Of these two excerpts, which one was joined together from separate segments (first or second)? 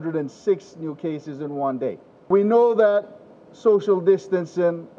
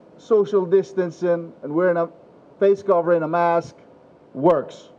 first